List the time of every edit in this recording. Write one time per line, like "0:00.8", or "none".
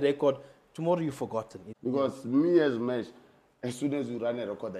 0:01.6